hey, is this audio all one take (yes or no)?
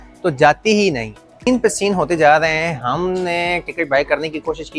no